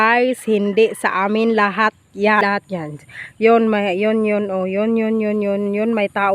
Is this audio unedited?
no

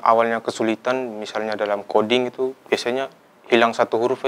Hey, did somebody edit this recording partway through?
no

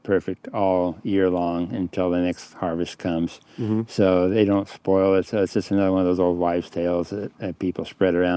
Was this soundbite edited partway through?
no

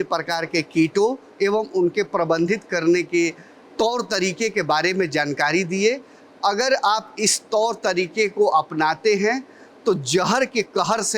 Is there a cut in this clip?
no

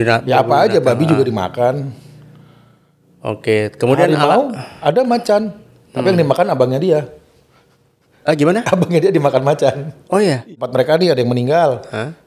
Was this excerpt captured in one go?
no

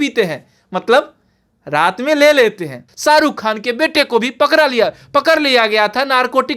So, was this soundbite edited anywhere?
yes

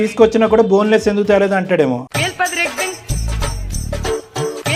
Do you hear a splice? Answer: no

